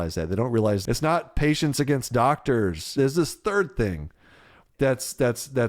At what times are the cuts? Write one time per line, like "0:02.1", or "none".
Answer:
0:00.8
0:02.9